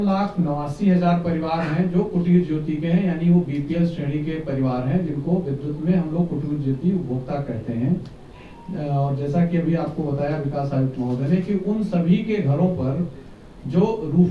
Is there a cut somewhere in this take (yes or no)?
no